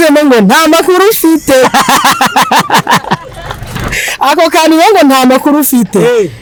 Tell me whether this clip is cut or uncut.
uncut